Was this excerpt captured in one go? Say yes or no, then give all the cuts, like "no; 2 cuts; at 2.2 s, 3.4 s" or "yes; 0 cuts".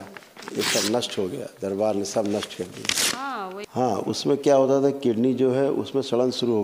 no; 1 cut; at 3.6 s